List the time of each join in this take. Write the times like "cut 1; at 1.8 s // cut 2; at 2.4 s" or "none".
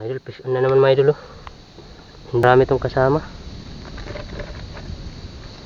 cut 1; at 2.4 s